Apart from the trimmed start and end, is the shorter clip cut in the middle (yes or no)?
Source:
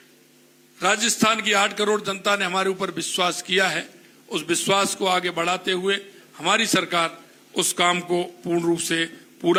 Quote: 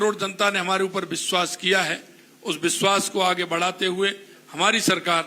no